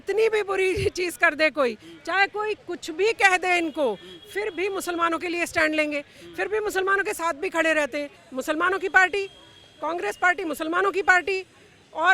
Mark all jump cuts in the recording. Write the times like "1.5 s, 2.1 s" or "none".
8.2 s